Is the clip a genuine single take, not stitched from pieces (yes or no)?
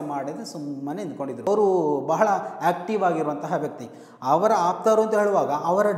no